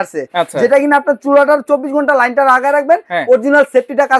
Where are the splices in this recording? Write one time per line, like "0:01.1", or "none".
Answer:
none

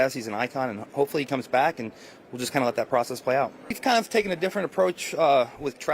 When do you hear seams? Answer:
0:03.6

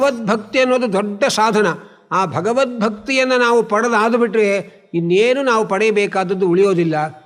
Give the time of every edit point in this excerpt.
none

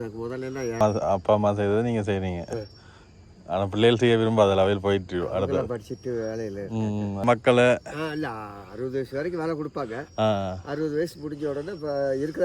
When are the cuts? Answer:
0:00.8
0:07.2

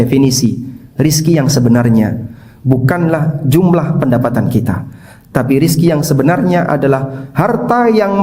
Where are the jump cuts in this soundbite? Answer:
none

